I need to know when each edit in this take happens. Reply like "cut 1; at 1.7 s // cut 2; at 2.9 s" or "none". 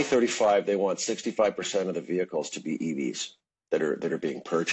none